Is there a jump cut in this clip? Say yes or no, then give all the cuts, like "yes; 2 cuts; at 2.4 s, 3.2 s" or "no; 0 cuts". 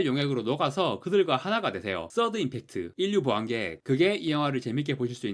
no; 0 cuts